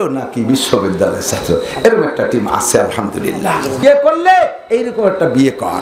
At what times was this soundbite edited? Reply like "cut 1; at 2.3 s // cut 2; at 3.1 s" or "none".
cut 1; at 3.8 s